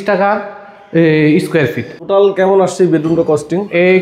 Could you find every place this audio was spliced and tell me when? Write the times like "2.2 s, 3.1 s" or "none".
1.9 s

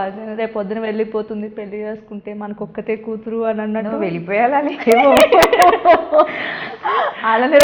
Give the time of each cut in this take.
none

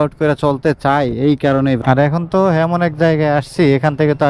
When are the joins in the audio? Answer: 1.8 s

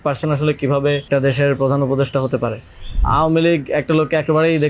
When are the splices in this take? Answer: 1.1 s, 3.0 s

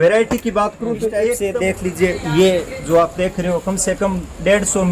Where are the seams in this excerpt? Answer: 1.4 s

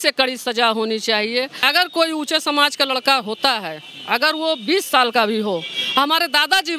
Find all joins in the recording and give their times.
1.6 s

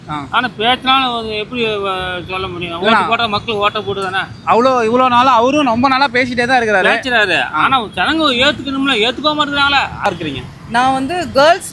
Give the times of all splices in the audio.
10.1 s

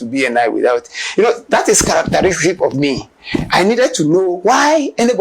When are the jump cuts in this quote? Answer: none

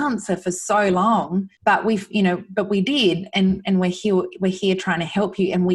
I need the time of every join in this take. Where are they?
1.5 s

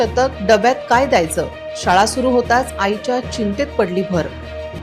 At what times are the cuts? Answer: none

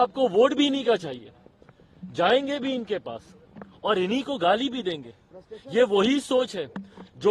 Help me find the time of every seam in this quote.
none

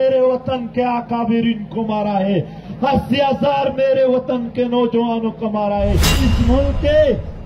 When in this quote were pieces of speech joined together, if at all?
2.6 s, 6.2 s

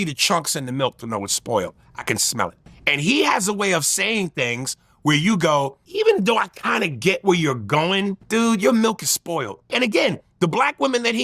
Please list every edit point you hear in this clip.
2.7 s, 5.8 s, 8.2 s, 9.7 s

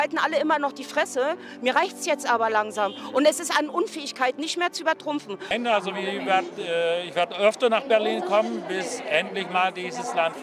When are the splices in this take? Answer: 5.5 s

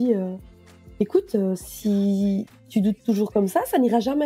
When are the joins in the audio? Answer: none

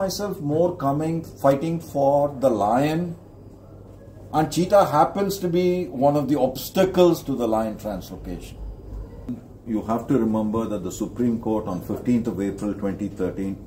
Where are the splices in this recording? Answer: 9.3 s

